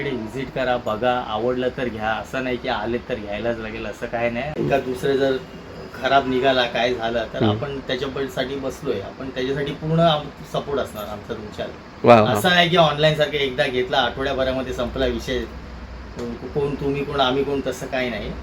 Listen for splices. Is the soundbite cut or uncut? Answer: cut